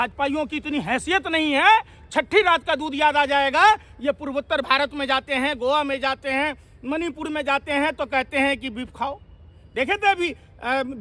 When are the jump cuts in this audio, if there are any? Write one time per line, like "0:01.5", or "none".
none